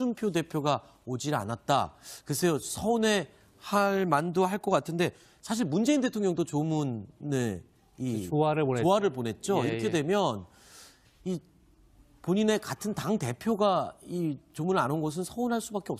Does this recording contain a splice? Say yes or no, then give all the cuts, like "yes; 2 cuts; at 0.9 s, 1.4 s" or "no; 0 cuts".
yes; 1 cut; at 11.0 s